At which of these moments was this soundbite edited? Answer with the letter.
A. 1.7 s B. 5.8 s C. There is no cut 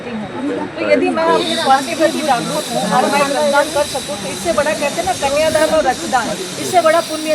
C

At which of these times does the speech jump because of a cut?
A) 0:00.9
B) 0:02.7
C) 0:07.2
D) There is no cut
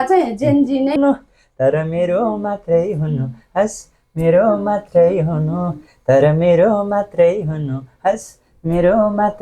A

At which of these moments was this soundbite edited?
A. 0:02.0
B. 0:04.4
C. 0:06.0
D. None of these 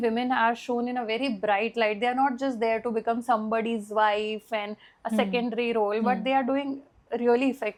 D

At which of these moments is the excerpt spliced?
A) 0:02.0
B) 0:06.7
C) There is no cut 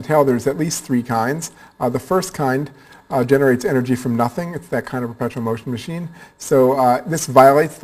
B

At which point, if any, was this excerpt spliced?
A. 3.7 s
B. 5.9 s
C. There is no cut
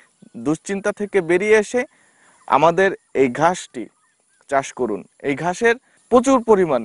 B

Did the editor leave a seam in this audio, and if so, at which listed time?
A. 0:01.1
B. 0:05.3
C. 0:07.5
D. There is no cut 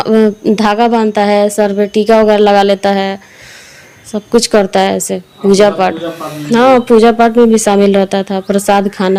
D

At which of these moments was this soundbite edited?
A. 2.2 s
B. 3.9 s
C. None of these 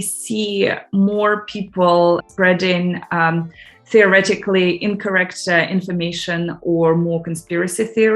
A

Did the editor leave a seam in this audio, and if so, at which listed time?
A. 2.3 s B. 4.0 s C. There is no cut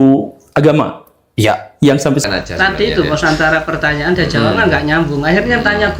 A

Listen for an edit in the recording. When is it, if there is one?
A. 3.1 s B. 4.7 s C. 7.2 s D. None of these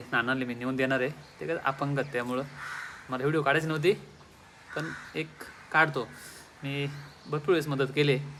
D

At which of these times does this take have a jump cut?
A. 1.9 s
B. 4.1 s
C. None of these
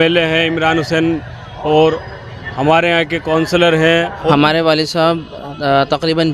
B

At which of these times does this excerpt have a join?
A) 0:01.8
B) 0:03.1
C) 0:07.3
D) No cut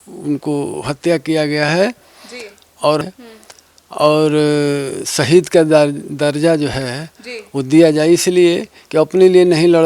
B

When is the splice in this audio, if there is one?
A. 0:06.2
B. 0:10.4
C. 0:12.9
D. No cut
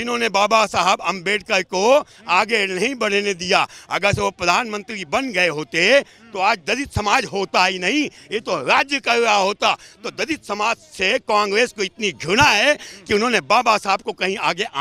D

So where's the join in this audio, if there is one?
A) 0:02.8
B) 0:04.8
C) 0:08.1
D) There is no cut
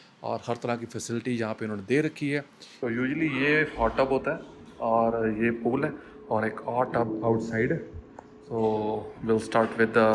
A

